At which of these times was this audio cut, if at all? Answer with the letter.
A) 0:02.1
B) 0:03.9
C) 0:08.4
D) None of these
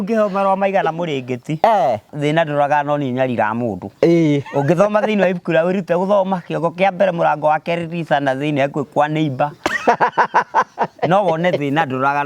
A